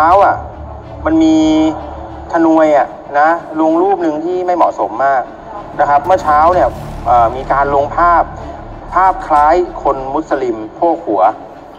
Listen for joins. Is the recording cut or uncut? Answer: uncut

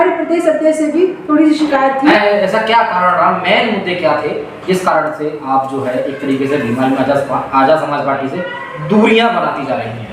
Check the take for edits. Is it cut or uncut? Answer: cut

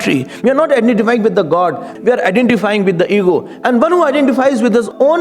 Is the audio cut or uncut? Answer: cut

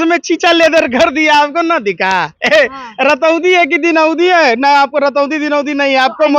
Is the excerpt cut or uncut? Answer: uncut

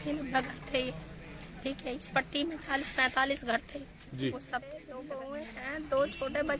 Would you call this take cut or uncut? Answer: cut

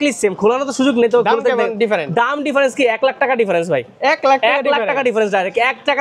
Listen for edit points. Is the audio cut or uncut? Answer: uncut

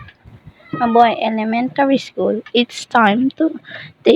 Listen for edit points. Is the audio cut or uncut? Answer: cut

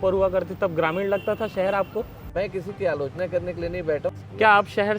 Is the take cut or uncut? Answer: cut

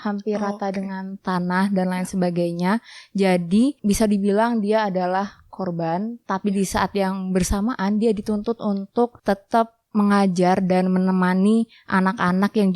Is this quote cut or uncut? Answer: cut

